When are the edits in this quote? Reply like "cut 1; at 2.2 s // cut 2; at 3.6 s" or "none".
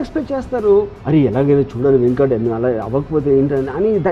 none